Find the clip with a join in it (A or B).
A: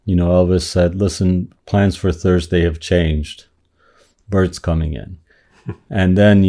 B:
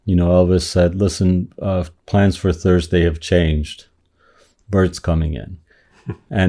A